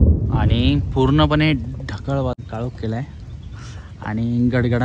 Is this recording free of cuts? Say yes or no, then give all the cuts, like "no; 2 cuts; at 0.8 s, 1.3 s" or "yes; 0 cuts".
no; 1 cut; at 2.4 s